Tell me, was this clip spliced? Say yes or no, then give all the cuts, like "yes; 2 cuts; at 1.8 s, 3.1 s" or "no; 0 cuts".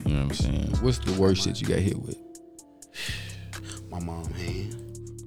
yes; 1 cut; at 1.0 s